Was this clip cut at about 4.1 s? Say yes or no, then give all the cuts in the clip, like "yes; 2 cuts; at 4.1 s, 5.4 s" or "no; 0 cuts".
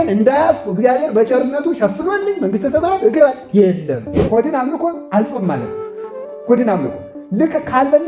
yes; 1 cut; at 4.1 s